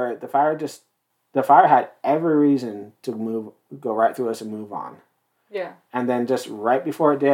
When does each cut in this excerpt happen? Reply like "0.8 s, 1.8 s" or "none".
none